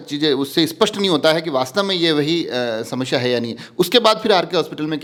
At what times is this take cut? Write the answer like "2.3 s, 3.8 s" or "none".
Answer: none